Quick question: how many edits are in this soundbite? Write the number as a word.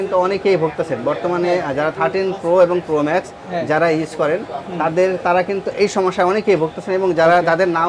zero